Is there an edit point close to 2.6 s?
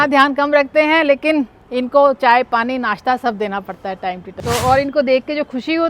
no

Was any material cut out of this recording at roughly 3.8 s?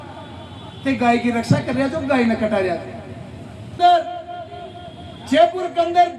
yes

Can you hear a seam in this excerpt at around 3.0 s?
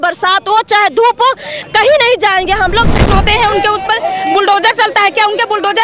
yes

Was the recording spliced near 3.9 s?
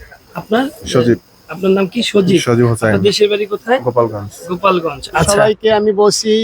no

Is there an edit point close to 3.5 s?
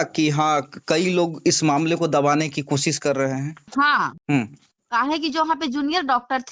no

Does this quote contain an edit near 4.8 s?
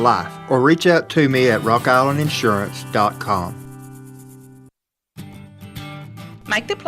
yes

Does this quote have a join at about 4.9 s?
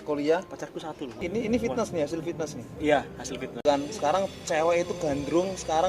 no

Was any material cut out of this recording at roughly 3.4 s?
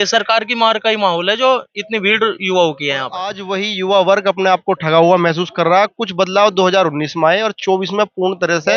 yes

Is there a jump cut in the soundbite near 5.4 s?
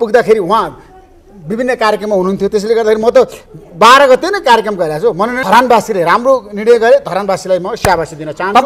yes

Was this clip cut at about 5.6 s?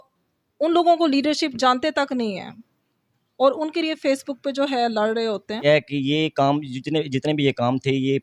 yes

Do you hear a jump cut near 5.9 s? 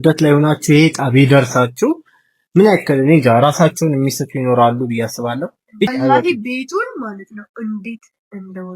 yes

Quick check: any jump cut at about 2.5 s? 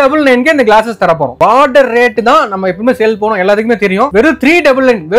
no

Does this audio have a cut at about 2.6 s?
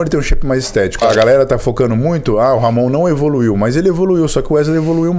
no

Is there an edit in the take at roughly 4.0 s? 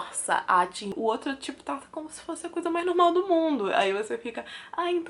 no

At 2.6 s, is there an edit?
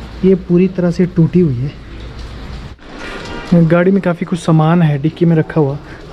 yes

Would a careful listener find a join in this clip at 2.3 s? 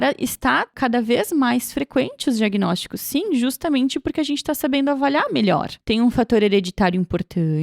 no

